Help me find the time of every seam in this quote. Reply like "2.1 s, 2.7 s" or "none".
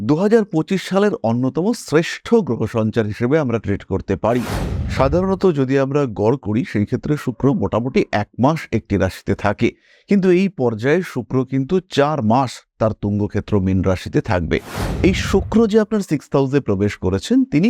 4.8 s, 14.8 s